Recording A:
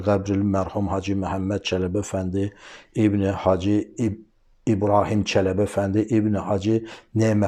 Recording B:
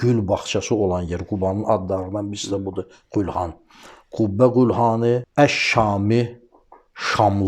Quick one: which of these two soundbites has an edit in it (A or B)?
B